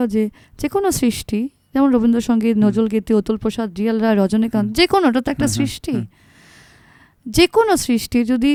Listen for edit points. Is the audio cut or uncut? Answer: uncut